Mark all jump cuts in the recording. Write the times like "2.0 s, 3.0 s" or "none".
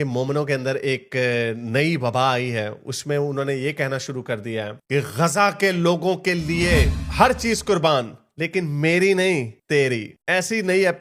none